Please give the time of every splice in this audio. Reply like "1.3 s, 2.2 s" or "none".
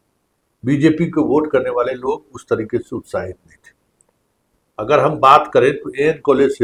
none